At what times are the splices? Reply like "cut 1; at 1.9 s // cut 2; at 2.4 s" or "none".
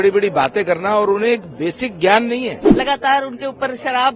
cut 1; at 2.6 s